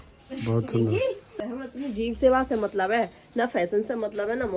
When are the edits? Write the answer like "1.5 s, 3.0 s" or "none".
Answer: 1.3 s